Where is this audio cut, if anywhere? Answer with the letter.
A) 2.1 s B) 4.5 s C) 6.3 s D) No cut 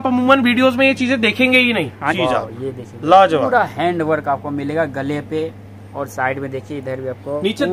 A